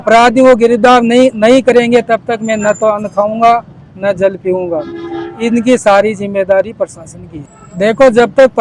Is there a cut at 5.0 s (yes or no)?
no